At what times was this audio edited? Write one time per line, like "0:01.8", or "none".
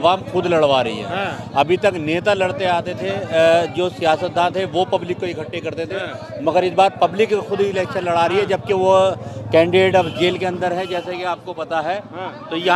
none